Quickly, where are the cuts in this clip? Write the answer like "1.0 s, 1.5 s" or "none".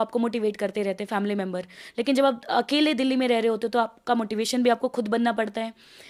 none